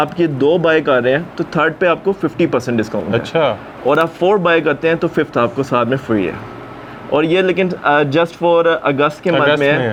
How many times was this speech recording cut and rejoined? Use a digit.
0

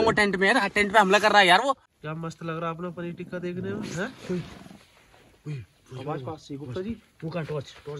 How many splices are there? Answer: 1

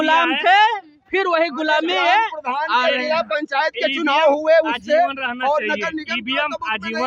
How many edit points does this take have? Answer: 0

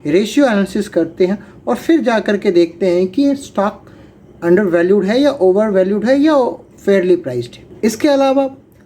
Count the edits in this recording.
1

